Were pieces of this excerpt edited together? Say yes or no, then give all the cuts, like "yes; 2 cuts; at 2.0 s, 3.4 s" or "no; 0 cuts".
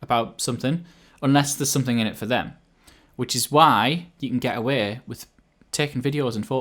no; 0 cuts